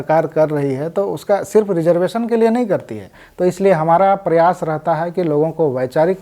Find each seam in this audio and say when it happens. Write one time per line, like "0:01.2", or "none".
0:03.0